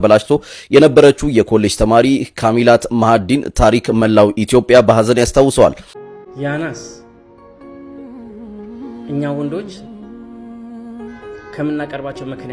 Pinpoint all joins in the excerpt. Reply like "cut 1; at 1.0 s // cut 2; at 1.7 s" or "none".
cut 1; at 5.9 s